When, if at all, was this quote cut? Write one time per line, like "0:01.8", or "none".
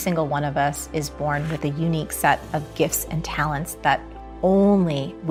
none